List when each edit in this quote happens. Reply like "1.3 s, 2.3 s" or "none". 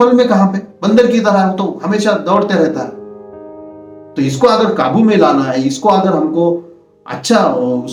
none